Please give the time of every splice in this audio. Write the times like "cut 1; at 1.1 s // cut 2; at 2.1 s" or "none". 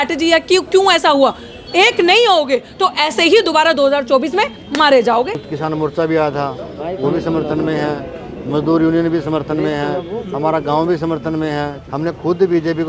cut 1; at 1.6 s // cut 2; at 5.5 s // cut 3; at 11.8 s